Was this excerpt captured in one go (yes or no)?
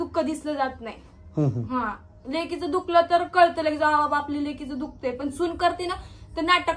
yes